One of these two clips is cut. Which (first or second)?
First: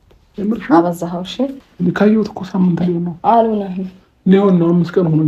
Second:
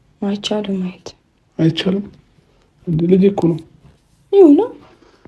first